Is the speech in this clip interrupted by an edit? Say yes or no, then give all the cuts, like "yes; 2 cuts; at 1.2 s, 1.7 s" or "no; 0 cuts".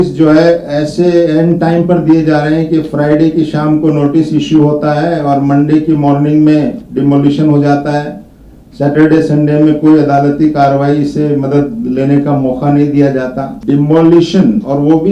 yes; 1 cut; at 13.6 s